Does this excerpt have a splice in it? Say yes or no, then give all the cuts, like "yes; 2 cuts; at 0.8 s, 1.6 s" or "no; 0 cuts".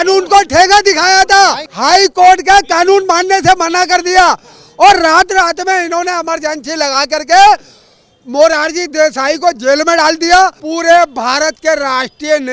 yes; 2 cuts; at 1.7 s, 10.6 s